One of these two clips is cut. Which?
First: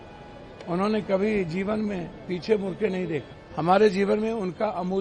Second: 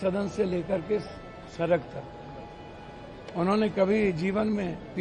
first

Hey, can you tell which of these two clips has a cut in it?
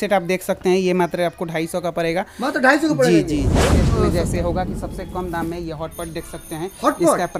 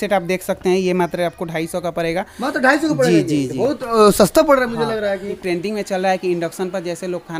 first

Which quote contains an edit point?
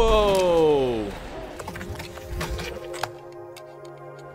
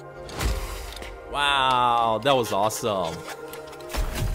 first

